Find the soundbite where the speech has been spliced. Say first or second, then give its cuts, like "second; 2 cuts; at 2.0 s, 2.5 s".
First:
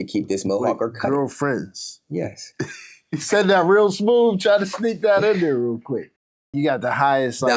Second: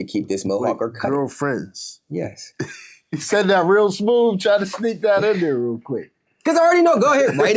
first; 1 cut; at 6.4 s